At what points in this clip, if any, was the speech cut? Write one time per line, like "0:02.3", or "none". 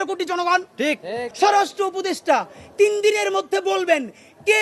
0:01.3